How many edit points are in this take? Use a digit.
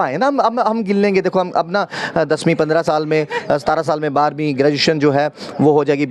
0